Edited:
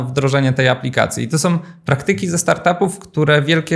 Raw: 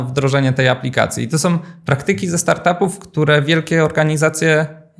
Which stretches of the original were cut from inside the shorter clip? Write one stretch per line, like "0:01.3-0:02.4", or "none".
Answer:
none